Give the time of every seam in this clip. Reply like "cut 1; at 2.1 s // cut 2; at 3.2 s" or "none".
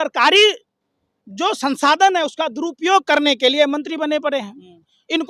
none